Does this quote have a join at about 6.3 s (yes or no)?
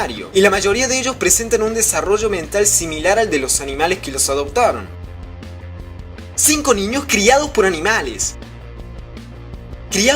yes